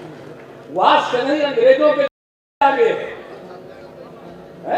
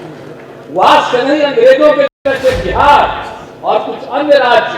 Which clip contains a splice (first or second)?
second